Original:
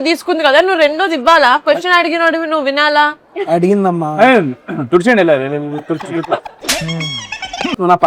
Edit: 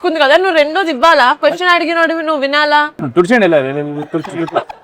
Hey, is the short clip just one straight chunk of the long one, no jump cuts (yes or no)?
no